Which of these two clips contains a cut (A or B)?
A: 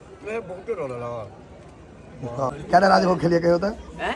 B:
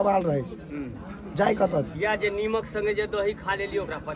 A